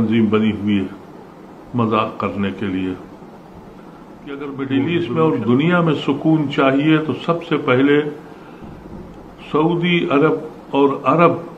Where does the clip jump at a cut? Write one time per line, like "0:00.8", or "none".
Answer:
0:04.4